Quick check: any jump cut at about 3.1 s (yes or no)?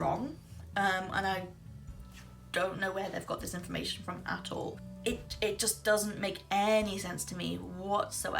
no